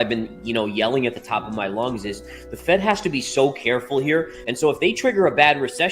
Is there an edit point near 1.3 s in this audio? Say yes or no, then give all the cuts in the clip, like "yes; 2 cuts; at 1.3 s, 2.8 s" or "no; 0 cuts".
no; 1 cut; at 4.4 s